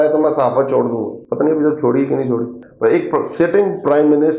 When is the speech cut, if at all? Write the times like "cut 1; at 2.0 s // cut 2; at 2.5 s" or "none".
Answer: cut 1; at 1.2 s // cut 2; at 2.6 s